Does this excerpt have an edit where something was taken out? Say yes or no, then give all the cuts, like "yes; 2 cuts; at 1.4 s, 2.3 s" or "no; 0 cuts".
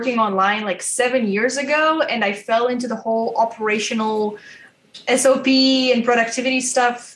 no; 0 cuts